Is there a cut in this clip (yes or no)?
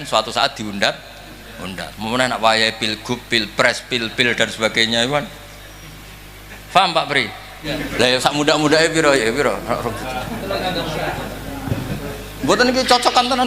yes